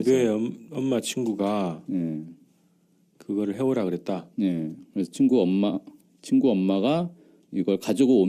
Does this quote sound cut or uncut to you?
uncut